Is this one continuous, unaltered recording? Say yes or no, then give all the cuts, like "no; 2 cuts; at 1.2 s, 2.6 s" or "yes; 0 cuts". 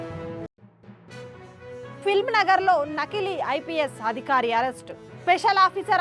yes; 0 cuts